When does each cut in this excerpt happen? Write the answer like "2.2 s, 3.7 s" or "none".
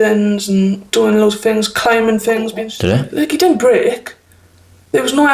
2.5 s